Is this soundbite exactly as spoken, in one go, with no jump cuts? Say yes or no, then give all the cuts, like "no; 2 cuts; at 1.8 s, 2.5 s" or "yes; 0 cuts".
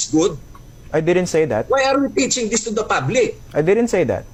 yes; 0 cuts